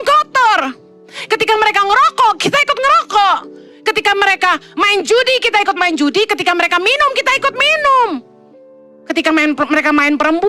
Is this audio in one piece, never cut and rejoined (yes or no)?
yes